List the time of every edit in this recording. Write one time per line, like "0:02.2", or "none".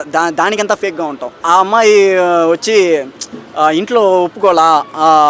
0:01.4

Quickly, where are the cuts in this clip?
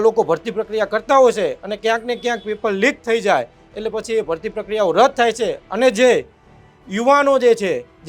none

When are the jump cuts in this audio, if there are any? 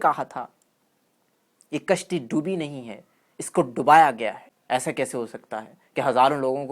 0:04.5

